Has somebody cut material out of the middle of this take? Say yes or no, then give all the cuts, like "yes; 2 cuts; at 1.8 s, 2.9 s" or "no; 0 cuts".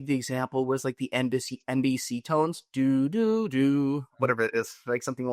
no; 0 cuts